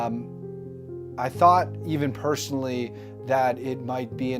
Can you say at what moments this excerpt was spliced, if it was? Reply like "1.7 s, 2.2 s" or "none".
2.5 s